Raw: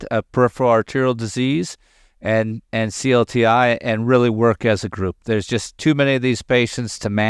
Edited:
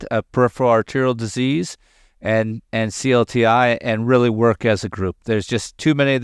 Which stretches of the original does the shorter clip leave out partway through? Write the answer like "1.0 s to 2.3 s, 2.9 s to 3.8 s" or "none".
none